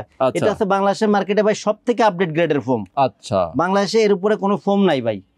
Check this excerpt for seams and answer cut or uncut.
uncut